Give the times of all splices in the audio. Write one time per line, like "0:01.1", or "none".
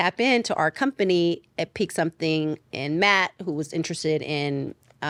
none